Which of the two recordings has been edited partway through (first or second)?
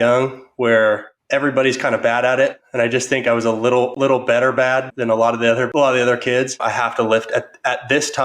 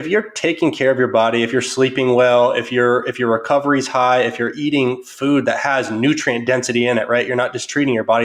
first